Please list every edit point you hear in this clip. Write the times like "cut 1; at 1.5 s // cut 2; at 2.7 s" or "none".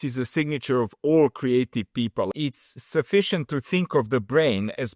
cut 1; at 2.3 s

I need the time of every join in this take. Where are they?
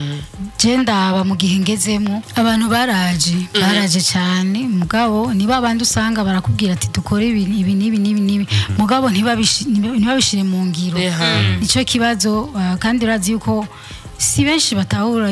cut 1; at 2.2 s

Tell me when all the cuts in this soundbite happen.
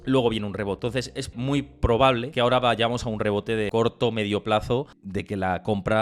cut 1; at 1.2 s // cut 2; at 2.3 s // cut 3; at 3.7 s // cut 4; at 5.0 s

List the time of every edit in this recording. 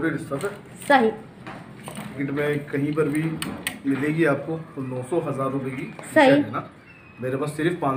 cut 1; at 2.2 s

